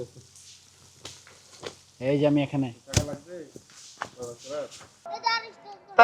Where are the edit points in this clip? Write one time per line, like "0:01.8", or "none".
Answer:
0:04.9